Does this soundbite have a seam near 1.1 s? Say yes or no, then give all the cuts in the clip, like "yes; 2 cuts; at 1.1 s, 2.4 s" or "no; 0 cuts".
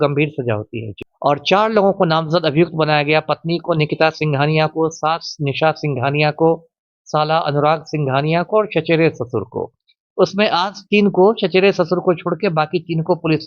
yes; 1 cut; at 1.1 s